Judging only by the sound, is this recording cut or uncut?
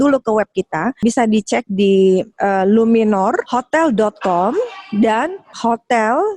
cut